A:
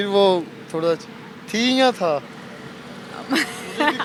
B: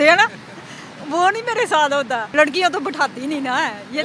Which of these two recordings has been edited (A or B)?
B